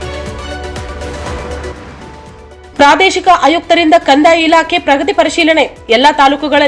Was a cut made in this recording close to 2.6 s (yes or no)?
yes